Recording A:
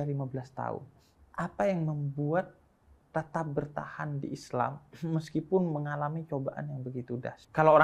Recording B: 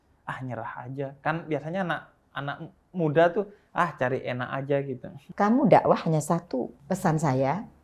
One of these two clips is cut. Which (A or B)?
B